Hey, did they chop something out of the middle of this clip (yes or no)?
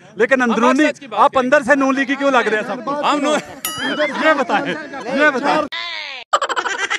no